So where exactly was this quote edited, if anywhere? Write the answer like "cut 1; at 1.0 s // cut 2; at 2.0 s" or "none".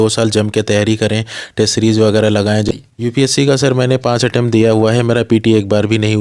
cut 1; at 2.6 s